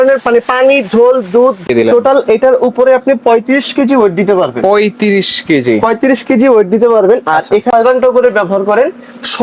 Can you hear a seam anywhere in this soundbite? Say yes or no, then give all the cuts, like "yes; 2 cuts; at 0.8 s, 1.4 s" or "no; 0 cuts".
yes; 2 cuts; at 1.6 s, 7.7 s